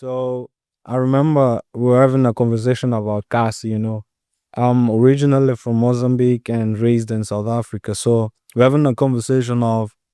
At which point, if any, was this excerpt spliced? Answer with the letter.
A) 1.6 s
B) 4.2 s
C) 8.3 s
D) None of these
D